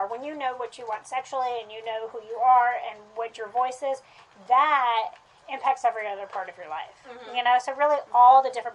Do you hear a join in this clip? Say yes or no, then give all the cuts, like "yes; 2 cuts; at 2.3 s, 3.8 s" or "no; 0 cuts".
no; 0 cuts